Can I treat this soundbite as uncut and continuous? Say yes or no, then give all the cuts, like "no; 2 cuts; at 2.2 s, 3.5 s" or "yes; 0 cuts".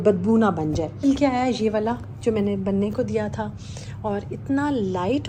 no; 1 cut; at 1.0 s